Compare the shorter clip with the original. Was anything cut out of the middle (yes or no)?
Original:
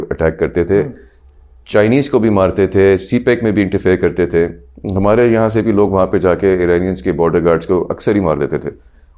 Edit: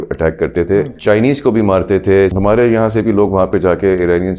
yes